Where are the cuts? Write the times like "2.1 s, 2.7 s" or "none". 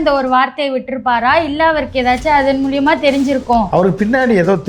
3.7 s